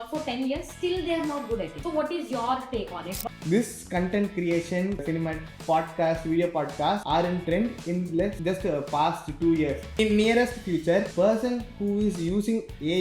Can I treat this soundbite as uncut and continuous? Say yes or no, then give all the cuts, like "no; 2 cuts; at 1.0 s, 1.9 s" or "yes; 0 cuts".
no; 7 cuts; at 1.8 s, 3.1 s, 5.0 s, 7.0 s, 8.4 s, 9.9 s, 11.1 s